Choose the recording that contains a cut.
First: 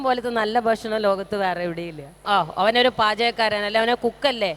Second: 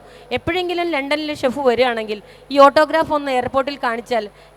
first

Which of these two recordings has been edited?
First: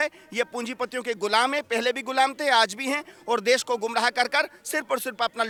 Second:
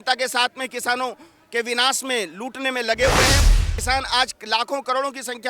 second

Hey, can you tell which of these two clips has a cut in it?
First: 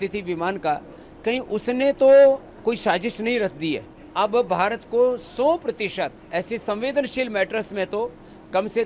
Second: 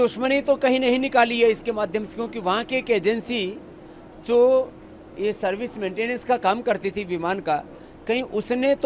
first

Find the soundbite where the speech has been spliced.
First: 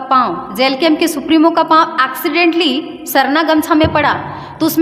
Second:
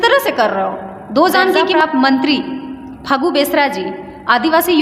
second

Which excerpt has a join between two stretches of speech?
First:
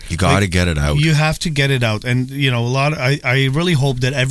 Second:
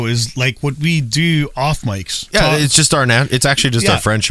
second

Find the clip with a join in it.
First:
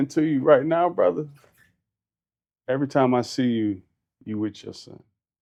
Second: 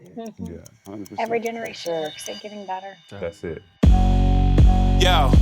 second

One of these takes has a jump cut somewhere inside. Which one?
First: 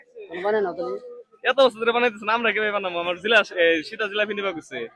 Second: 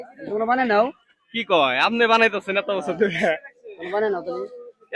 second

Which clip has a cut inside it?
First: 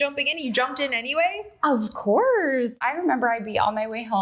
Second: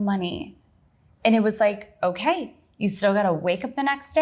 first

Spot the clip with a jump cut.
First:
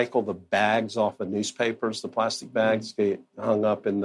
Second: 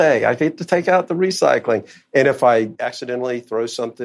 second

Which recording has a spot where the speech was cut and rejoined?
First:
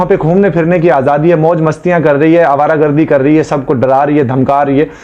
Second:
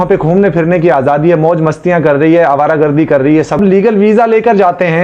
second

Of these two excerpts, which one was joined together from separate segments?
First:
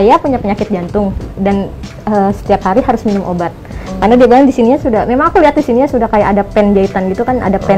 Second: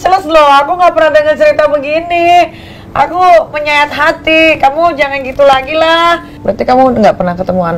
second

